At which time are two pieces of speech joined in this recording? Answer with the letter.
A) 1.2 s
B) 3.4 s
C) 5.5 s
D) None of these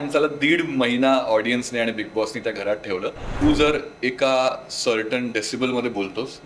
B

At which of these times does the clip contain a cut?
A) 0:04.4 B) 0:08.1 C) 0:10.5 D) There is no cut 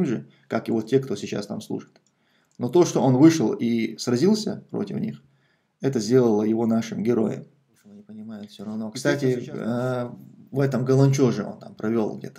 B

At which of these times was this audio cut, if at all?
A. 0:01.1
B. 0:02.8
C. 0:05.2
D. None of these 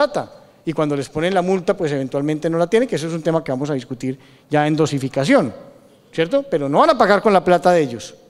B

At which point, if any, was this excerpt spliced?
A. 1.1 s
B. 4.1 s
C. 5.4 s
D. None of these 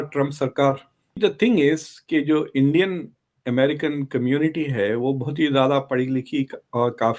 D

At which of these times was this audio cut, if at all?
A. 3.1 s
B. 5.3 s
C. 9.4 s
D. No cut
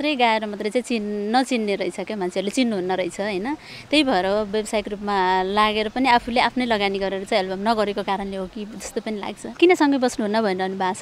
C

